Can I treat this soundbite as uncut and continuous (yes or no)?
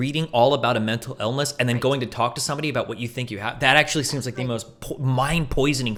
yes